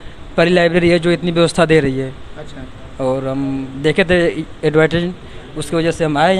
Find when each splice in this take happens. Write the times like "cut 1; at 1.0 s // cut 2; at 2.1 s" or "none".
none